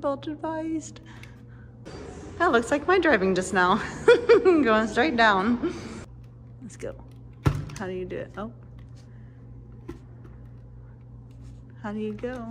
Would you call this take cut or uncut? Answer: cut